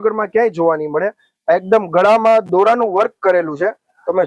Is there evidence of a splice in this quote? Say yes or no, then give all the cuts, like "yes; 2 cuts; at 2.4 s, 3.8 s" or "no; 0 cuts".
no; 0 cuts